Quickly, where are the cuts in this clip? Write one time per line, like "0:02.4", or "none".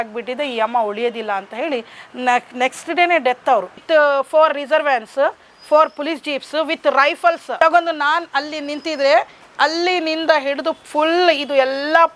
0:03.8
0:07.5